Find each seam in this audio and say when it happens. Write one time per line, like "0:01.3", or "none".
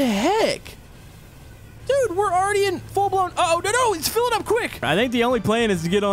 0:04.8